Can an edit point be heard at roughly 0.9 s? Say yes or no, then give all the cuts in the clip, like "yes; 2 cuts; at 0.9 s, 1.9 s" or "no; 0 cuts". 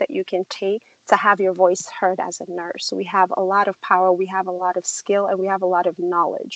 yes; 1 cut; at 0.9 s